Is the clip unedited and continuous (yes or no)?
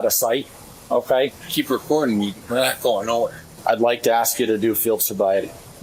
no